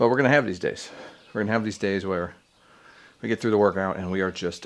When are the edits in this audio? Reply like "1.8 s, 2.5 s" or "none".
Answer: none